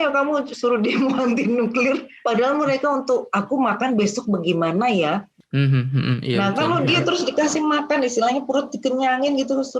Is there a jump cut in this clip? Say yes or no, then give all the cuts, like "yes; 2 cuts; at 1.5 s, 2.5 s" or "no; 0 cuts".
yes; 2 cuts; at 2.1 s, 5.3 s